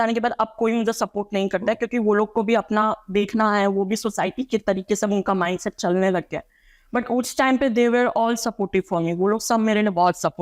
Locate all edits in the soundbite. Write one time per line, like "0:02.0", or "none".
none